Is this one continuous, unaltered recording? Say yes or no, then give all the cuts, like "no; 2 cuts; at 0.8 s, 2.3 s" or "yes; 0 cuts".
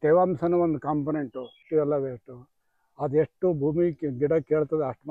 no; 1 cut; at 1.6 s